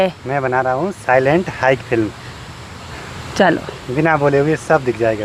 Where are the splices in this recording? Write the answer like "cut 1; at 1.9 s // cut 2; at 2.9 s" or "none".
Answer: none